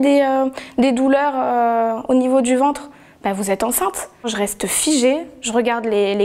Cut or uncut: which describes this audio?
cut